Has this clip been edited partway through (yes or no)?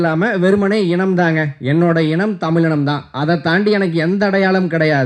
no